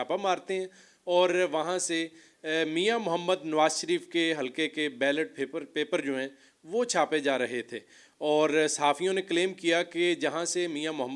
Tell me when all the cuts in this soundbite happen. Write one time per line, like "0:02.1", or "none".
none